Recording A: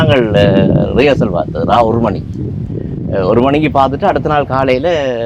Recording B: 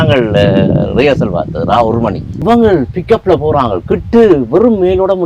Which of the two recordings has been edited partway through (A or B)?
B